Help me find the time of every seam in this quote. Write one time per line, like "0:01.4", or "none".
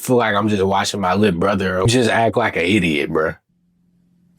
0:03.4